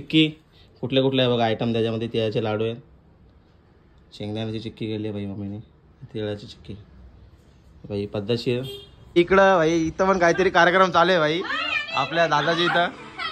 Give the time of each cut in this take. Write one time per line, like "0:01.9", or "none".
0:09.1